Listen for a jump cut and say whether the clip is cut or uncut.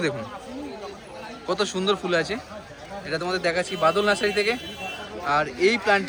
uncut